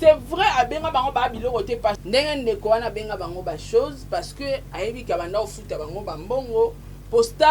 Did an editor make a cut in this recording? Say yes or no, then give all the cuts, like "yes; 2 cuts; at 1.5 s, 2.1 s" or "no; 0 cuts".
yes; 1 cut; at 2.0 s